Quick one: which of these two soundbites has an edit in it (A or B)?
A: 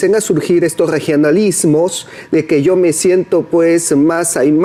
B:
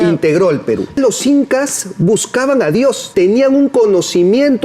B